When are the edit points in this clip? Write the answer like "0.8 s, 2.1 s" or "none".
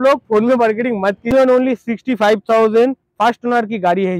1.3 s